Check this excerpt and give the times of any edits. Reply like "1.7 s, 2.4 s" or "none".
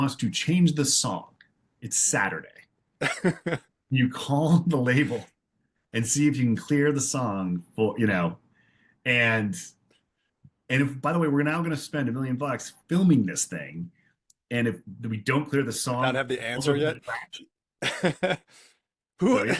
none